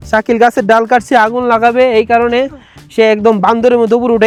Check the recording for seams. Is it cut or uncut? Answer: uncut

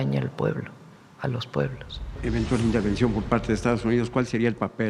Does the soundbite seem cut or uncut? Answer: cut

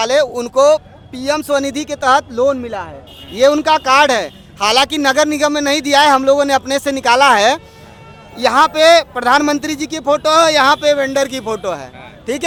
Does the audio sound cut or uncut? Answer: uncut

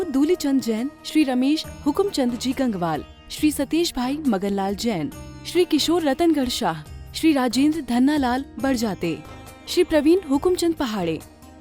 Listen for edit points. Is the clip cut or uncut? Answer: uncut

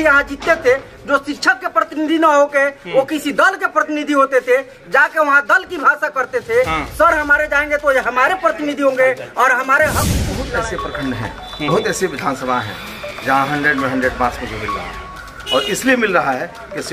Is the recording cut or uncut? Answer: cut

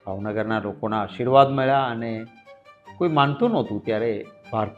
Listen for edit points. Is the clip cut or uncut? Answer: uncut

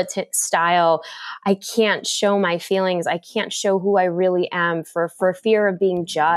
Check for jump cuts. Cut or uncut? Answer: uncut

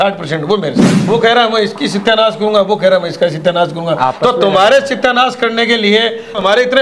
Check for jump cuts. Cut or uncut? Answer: cut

